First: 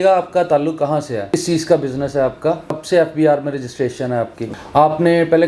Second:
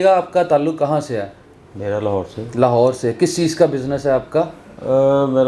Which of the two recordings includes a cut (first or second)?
first